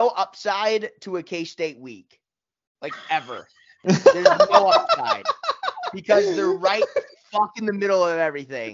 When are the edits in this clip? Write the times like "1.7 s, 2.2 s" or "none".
none